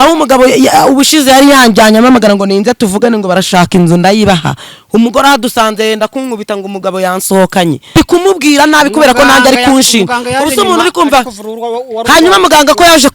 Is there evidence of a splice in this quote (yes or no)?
yes